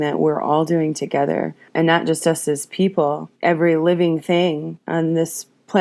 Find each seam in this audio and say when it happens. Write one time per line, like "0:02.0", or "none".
0:01.6
0:03.3
0:04.7